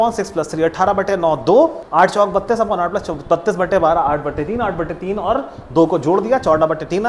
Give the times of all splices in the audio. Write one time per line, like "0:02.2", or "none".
0:01.8